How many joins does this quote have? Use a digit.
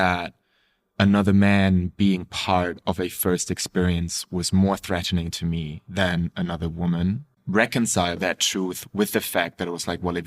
2